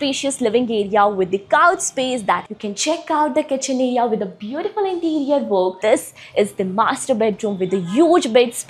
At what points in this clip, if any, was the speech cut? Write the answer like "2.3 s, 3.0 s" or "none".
2.5 s, 5.8 s